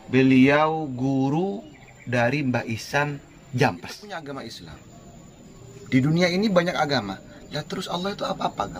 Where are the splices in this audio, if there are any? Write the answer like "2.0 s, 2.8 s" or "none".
4.0 s

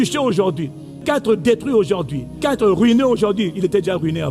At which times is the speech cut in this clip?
1.0 s, 2.4 s

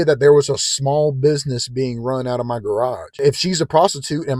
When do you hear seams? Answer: none

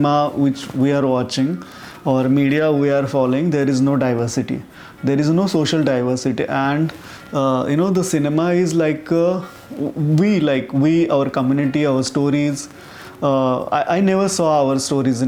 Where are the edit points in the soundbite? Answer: none

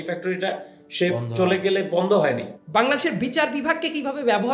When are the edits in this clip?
2.5 s

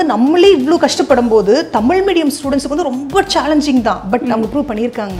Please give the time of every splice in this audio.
none

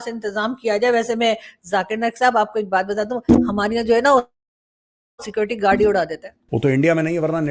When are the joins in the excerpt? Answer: 6.4 s

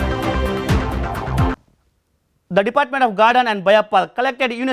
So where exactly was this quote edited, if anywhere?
1.6 s

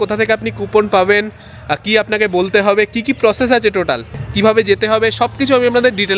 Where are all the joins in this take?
4.2 s

